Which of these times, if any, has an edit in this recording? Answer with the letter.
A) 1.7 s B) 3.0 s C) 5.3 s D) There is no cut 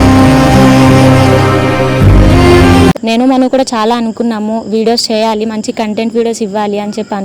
B